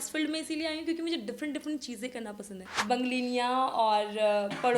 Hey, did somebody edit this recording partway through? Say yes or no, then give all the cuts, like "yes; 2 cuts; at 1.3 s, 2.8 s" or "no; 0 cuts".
yes; 1 cut; at 2.7 s